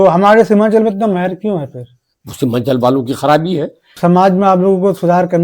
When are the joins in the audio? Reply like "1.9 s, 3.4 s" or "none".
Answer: 3.9 s